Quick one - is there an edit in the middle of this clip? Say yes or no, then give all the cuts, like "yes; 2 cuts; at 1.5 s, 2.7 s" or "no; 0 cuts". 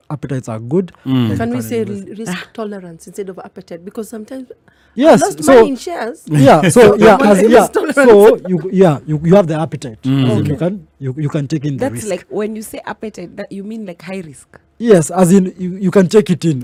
no; 0 cuts